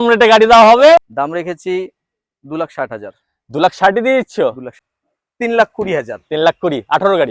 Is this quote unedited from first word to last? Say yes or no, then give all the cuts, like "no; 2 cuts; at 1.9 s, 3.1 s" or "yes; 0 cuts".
no; 2 cuts; at 1.1 s, 4.7 s